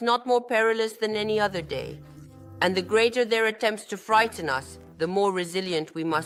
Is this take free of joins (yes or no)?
yes